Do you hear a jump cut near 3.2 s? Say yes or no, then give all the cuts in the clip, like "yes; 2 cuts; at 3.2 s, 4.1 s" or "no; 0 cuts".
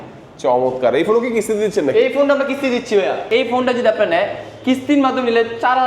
yes; 1 cut; at 3.2 s